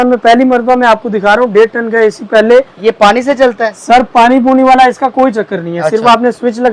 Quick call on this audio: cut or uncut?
uncut